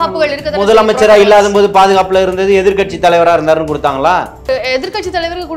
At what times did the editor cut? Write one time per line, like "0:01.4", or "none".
0:04.4